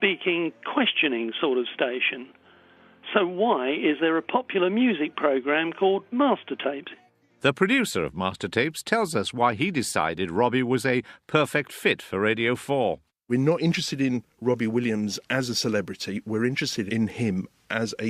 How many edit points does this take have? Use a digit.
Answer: 2